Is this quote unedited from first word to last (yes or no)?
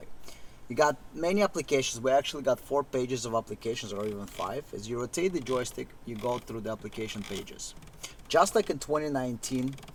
yes